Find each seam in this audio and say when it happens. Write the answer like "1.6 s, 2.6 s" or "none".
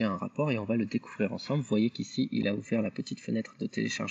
none